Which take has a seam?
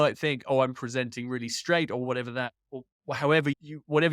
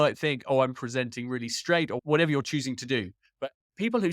second; 1 cut; at 2.0 s

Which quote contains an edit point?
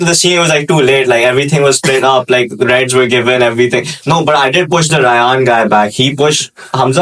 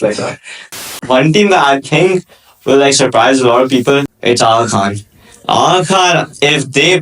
second; 2 cuts; at 0.8 s, 4.1 s

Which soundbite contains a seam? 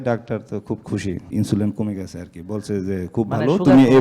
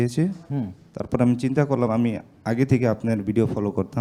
first; 1 cut; at 1.3 s

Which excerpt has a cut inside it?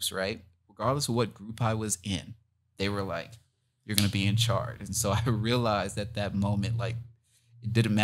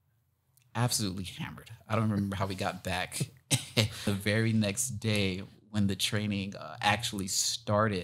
second; 1 cut; at 4.1 s

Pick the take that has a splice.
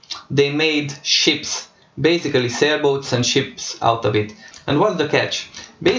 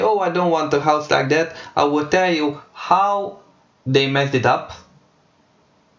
first; 1 cut; at 4.5 s

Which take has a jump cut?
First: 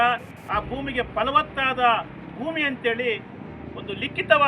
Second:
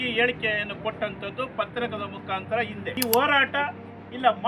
second; 1 cut; at 2.8 s

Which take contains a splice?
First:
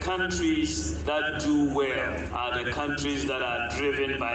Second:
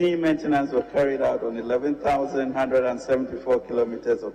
first; 2 cuts; at 0.9 s, 2.3 s

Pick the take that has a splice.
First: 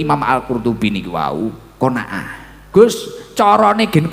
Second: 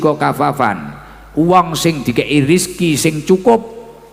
first; 1 cut; at 2.5 s

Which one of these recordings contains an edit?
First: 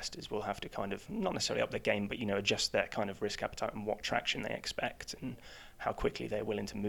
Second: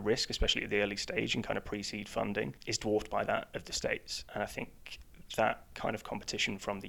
second; 2 cuts; at 2.6 s, 4.2 s

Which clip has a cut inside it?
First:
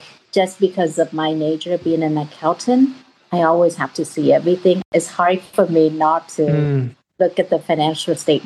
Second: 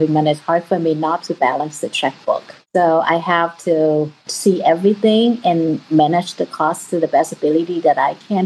second; 2 cuts; at 2.5 s, 4.2 s

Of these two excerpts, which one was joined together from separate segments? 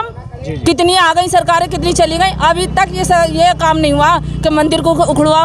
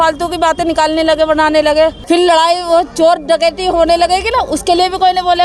second; 1 cut; at 2.0 s

